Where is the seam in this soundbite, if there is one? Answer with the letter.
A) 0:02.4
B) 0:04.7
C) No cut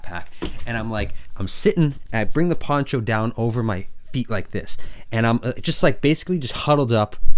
C